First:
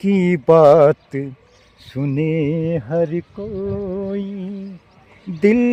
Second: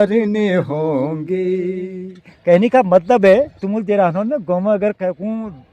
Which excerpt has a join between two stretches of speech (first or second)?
second